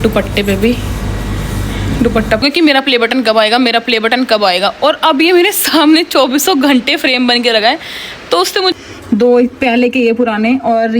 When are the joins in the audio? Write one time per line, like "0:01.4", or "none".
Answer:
0:02.4
0:08.8